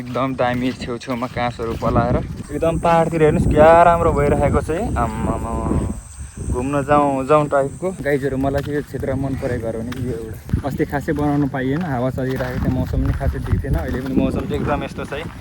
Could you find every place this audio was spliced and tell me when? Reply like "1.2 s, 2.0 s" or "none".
2.4 s, 8.0 s, 10.4 s